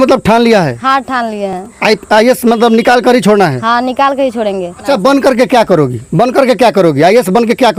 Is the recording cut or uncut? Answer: uncut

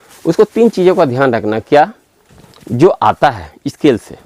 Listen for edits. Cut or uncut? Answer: uncut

